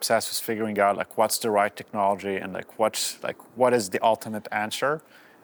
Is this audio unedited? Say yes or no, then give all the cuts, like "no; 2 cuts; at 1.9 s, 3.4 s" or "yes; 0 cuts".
yes; 0 cuts